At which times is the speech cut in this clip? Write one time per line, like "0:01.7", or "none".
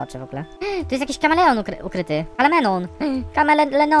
none

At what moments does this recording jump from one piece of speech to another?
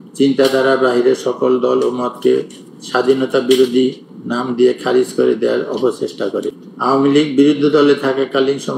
0:06.7

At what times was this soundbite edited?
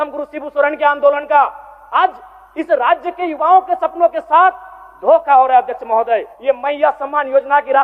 0:06.3

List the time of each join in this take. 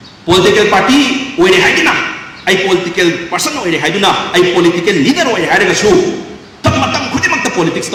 none

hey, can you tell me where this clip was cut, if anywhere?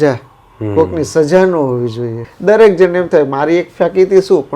0:02.3

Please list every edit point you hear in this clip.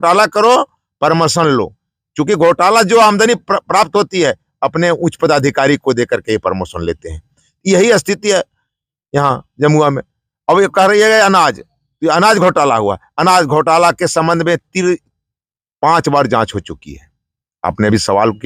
none

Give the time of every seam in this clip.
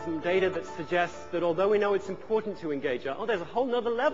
none

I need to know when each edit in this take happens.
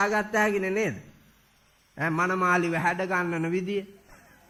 none

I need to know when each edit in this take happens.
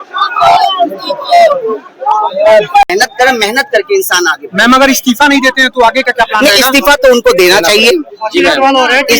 0:02.9

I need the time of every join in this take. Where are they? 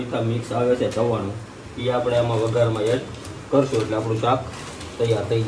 none

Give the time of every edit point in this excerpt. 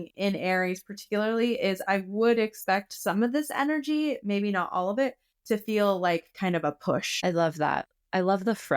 0:07.1

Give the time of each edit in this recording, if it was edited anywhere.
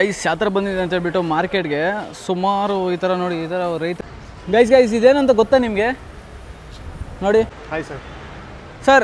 0:04.0
0:07.6

